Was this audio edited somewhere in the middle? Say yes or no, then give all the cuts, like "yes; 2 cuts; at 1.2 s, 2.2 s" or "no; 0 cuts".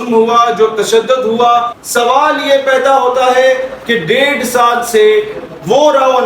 yes; 1 cut; at 1.8 s